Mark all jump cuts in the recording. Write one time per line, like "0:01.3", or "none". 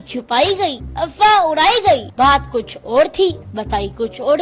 0:00.8
0:02.1
0:03.4

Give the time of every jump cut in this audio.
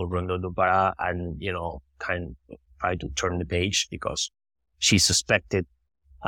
none

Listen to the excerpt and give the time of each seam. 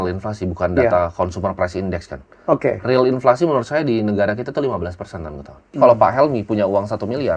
0:05.8

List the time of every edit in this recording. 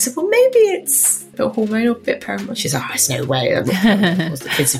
0:01.3

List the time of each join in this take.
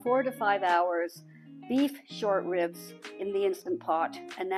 none

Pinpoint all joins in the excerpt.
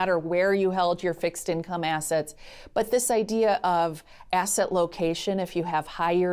none

